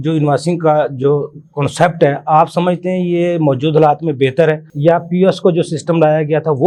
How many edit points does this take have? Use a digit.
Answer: 0